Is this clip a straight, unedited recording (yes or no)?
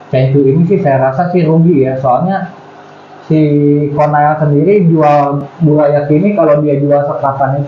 yes